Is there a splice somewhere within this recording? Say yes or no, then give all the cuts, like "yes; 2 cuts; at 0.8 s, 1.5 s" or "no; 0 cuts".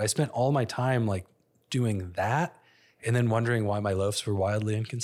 no; 0 cuts